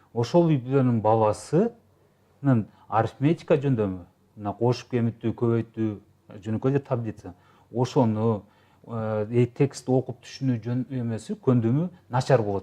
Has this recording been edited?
no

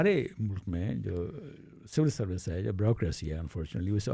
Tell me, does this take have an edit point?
no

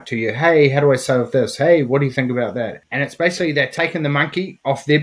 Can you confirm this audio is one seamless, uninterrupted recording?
no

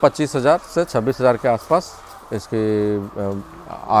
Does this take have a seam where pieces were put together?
no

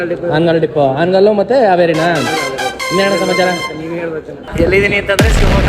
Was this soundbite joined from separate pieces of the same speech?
yes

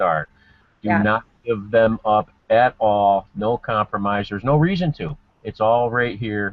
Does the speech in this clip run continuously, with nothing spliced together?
yes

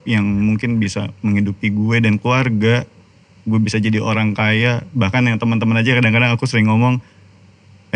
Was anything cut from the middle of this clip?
no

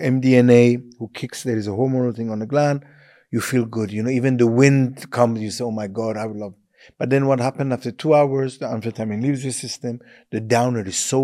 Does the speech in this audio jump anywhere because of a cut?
no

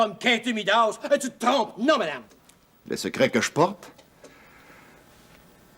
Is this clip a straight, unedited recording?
no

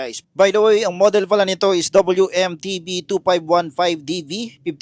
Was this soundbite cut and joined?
no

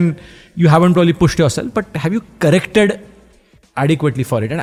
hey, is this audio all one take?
yes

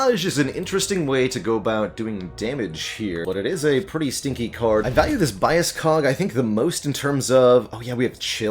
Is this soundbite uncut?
no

